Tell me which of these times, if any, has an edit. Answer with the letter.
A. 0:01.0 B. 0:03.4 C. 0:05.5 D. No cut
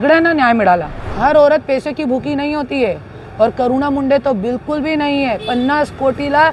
A